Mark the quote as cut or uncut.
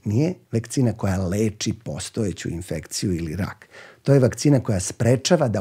uncut